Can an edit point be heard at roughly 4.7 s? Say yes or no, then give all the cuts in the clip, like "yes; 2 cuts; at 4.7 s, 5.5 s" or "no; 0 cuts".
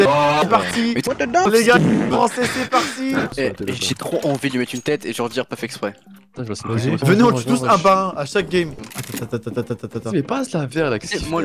no; 2 cuts; at 3.3 s, 8.9 s